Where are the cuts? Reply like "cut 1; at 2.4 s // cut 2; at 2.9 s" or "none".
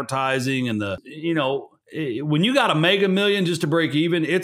cut 1; at 1.1 s // cut 2; at 1.8 s